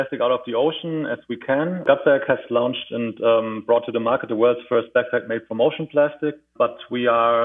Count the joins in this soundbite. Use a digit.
2